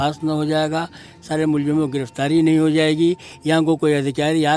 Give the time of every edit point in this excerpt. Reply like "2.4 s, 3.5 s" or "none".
none